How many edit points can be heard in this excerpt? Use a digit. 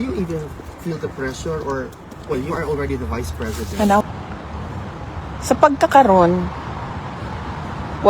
1